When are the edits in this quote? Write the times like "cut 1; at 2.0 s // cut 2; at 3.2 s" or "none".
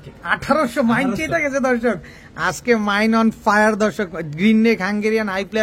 none